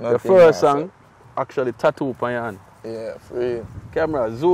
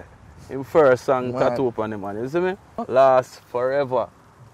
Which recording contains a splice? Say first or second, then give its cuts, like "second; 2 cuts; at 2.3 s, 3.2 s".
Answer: second; 1 cut; at 2.8 s